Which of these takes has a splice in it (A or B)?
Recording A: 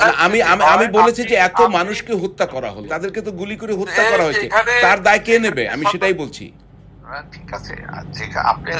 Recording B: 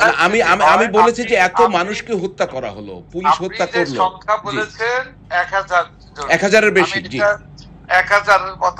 A